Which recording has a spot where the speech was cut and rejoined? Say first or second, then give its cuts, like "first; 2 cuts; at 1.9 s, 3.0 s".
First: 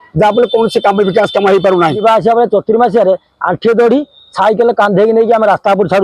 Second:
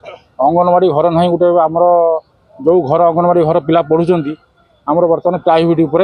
first; 1 cut; at 2.0 s